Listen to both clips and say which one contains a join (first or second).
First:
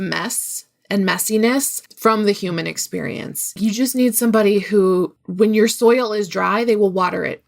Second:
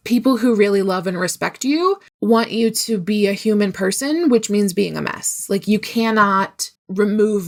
first